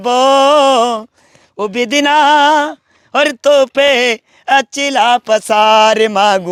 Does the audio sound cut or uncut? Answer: uncut